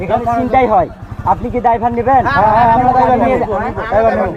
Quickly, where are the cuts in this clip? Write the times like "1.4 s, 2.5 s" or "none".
none